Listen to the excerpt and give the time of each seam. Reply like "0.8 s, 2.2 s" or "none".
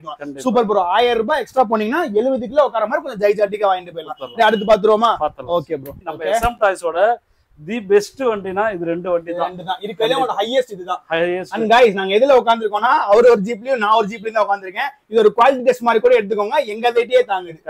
6.0 s